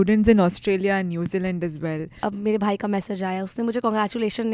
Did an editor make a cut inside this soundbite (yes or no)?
yes